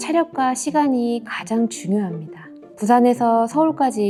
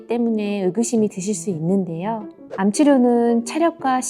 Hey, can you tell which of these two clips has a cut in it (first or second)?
second